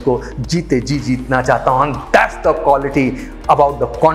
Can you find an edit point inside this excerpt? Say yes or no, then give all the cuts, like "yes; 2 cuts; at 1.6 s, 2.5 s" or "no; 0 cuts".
no; 0 cuts